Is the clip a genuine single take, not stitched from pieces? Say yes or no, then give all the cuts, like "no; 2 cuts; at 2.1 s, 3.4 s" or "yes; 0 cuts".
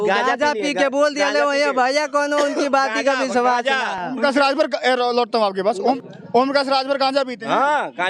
yes; 0 cuts